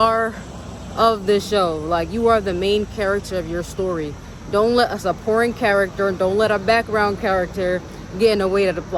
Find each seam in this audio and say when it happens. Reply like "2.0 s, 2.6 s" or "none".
none